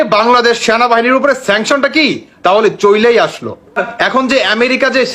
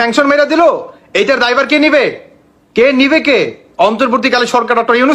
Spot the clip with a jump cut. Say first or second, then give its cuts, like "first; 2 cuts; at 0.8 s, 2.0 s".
first; 1 cut; at 3.9 s